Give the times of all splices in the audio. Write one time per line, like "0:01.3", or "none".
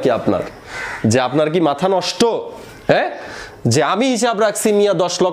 none